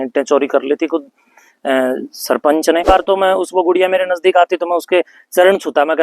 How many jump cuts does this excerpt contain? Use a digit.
1